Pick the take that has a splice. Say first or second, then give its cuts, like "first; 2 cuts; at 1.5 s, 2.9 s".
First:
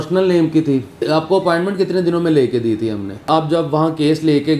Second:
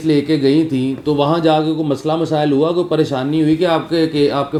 first; 2 cuts; at 1.0 s, 3.3 s